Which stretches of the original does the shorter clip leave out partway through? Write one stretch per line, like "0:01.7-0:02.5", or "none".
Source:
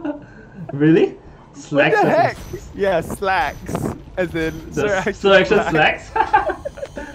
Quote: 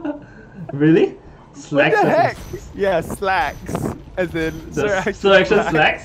none